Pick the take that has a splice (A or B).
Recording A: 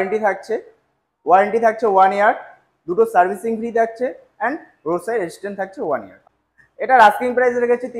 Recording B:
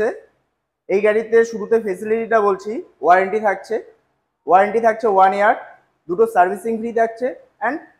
A